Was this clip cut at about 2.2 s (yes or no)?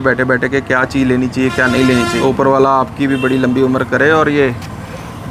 yes